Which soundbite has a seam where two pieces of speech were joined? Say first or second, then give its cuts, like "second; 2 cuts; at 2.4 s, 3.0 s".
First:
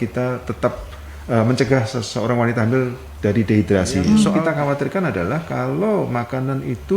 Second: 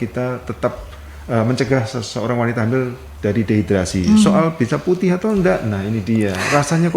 first; 1 cut; at 4.4 s